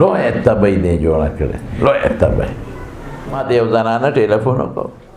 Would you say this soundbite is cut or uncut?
cut